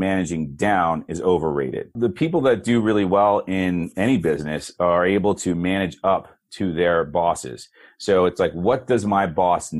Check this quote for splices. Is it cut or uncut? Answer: cut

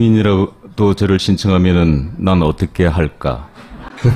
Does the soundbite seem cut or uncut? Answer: cut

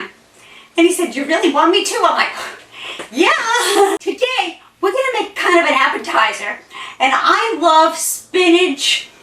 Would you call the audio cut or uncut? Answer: cut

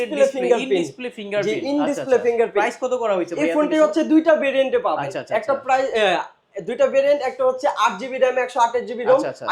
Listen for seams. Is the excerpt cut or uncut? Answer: uncut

